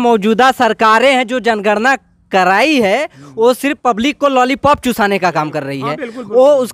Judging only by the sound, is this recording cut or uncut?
uncut